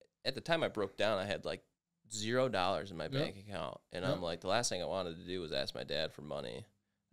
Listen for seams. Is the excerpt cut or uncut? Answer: uncut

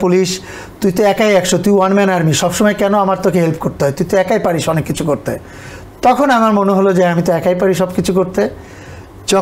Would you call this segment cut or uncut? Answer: uncut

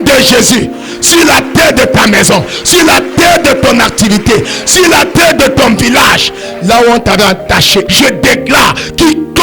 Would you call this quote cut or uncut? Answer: cut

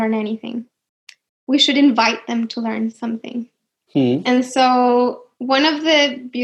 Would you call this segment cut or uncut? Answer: uncut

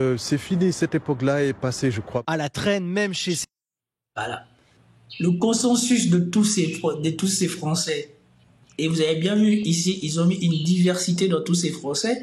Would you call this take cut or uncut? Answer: uncut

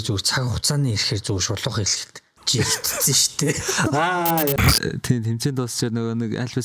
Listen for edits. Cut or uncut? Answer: cut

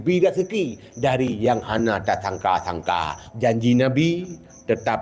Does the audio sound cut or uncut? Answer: cut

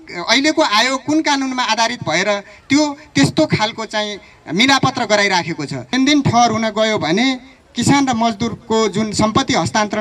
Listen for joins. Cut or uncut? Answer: cut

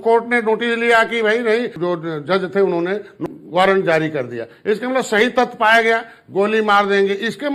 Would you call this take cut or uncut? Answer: cut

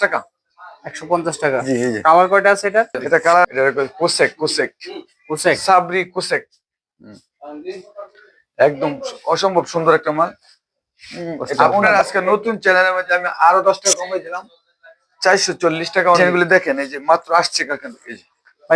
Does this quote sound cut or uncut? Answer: cut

